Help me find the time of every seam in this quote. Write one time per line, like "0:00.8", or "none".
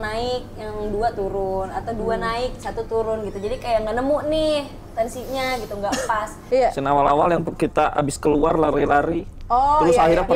0:06.4